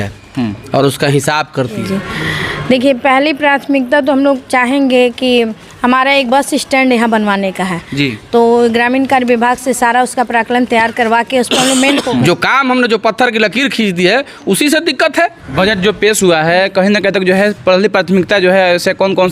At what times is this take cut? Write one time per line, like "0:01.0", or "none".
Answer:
0:01.8
0:12.1
0:15.4